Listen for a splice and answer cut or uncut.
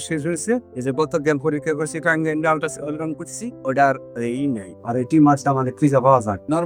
uncut